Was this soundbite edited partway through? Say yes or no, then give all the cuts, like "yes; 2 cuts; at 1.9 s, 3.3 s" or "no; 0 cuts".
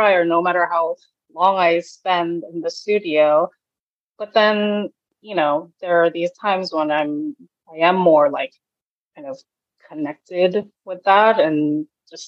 no; 0 cuts